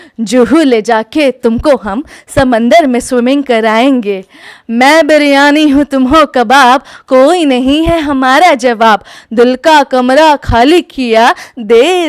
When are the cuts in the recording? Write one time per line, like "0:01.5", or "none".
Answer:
none